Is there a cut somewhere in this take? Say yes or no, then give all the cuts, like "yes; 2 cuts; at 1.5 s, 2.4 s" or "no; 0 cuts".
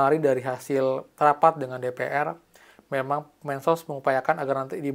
no; 0 cuts